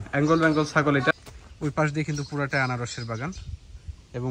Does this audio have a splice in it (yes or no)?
yes